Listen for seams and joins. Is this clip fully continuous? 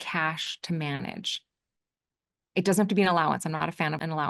yes; 0 cuts

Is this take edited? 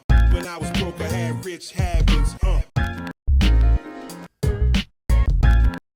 no; 0 cuts

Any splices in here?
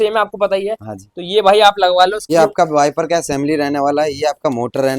yes; 1 cut; at 2.2 s

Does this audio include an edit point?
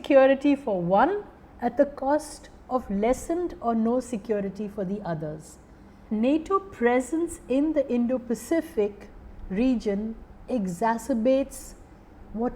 yes; 1 cut; at 5.9 s

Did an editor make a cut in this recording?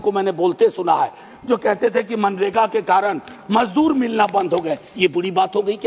no; 0 cuts

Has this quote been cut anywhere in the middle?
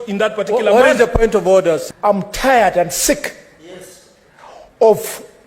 yes; 1 cut; at 1.9 s

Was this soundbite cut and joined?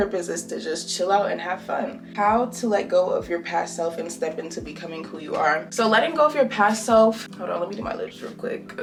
no; 0 cuts

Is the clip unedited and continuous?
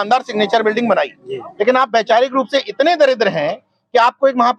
yes; 0 cuts

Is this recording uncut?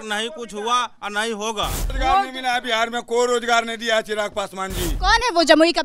no; 2 cuts; at 1.9 s, 4.9 s

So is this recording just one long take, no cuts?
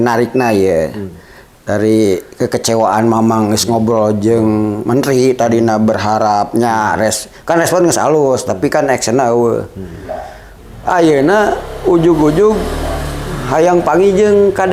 yes; 0 cuts

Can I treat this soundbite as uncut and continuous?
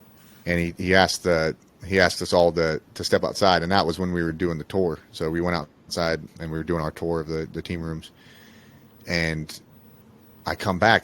no; 1 cut; at 6.4 s

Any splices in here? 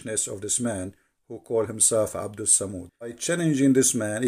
yes; 1 cut; at 3.2 s

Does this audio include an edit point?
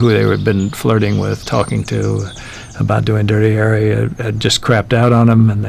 no; 0 cuts

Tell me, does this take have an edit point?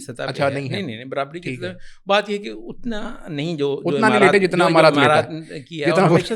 no; 0 cuts

